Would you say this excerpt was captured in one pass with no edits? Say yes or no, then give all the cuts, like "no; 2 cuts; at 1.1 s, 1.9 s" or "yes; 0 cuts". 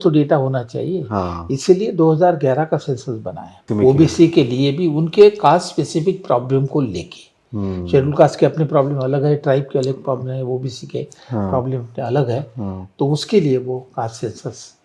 no; 1 cut; at 3.6 s